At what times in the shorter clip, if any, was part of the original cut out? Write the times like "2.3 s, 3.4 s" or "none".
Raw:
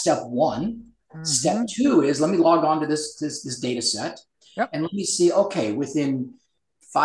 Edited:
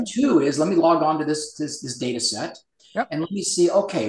none